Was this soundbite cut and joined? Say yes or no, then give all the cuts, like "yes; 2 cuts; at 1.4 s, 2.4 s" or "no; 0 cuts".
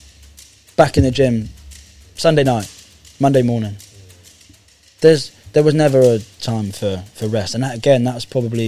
no; 0 cuts